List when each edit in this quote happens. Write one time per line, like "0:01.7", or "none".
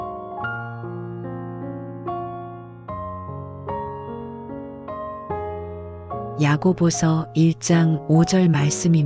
0:06.4